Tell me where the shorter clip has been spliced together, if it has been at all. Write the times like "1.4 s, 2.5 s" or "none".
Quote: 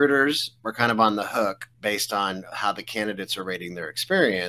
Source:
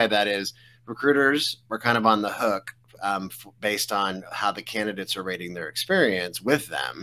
1.7 s